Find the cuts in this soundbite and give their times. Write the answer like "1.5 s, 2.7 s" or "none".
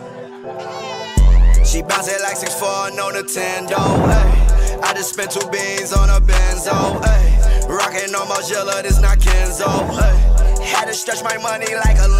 none

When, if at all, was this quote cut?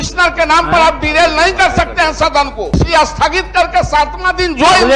2.6 s

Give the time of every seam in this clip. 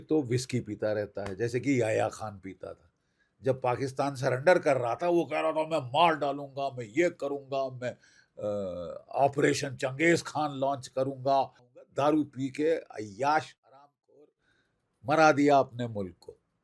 11.9 s

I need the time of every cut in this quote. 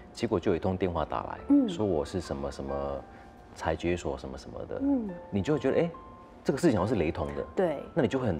5.2 s

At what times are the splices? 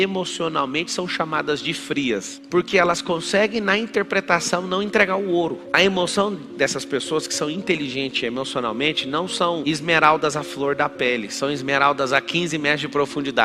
2.4 s

